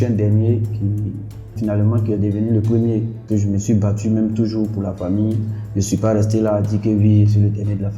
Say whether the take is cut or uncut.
cut